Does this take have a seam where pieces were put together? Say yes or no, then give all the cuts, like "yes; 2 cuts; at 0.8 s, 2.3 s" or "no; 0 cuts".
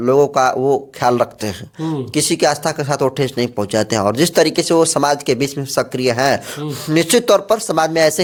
no; 0 cuts